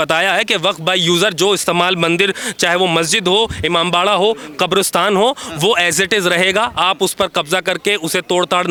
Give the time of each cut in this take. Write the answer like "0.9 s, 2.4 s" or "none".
none